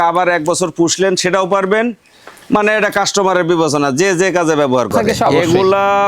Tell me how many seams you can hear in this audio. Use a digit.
1